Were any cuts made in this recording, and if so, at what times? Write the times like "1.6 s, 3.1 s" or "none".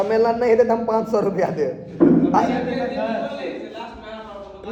none

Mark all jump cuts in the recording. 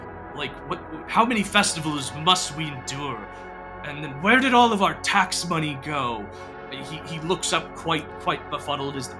none

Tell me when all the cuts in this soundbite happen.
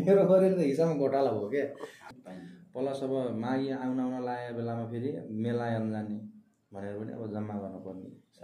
2.0 s

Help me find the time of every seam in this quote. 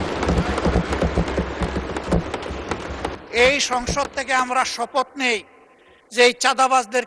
3.2 s

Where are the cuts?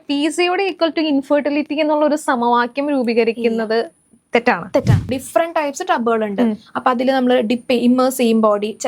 5.1 s

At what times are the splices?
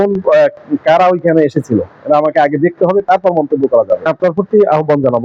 4.1 s

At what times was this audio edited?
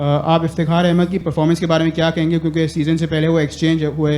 1.2 s

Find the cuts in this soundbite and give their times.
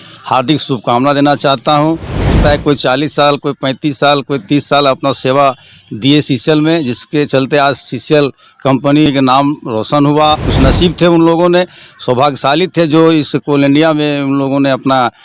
2.4 s, 9.1 s, 10.4 s

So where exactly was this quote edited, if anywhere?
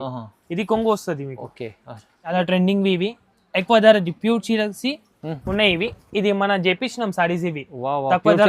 2.3 s

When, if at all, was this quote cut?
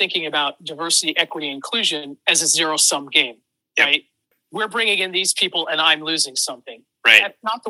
4.3 s

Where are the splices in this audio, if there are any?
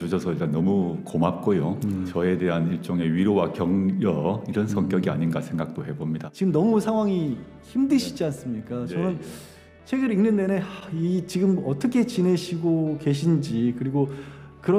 2.1 s, 6.3 s

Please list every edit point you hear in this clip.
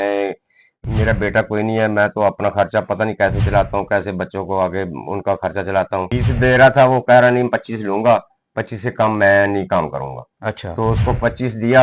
6.1 s

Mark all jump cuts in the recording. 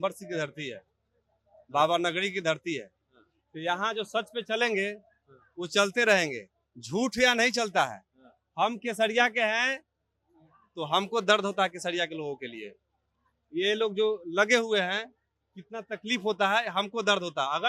none

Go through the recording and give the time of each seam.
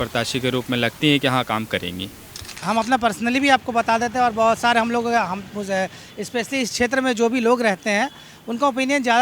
2.6 s

